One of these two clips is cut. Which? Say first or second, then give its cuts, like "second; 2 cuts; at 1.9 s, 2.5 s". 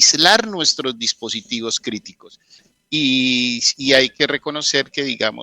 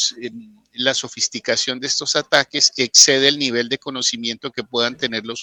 first; 1 cut; at 2.6 s